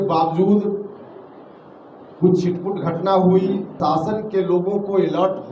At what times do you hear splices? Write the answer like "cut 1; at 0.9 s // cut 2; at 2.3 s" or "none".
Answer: cut 1; at 3.8 s